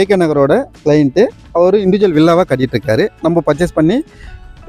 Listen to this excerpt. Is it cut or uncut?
uncut